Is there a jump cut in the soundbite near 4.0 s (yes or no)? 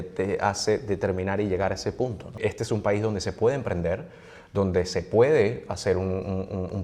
no